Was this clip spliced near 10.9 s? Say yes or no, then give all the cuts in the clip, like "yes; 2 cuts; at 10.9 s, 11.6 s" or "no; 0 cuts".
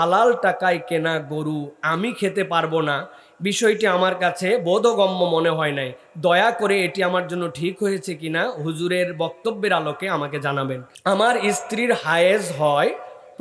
yes; 1 cut; at 10.9 s